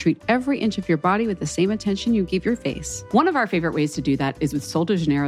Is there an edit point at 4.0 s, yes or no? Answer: no